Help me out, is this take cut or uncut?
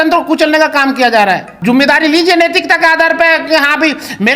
cut